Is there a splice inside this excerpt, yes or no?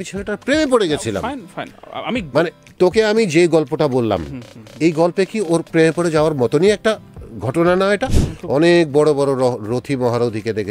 yes